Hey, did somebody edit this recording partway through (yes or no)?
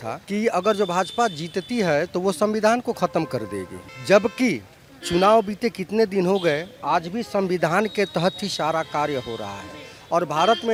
no